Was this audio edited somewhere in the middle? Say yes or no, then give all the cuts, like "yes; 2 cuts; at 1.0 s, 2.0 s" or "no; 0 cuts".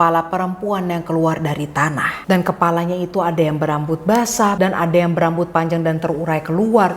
no; 0 cuts